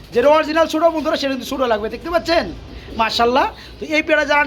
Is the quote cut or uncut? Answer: uncut